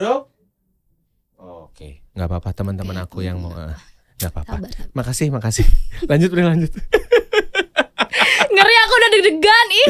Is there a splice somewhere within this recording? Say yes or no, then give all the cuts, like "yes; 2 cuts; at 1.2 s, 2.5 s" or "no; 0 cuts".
no; 0 cuts